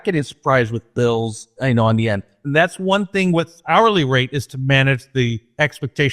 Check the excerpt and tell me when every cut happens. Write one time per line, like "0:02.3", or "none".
0:01.5
0:02.3
0:03.6